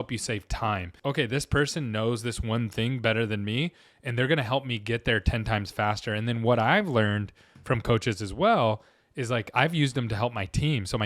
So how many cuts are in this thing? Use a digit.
1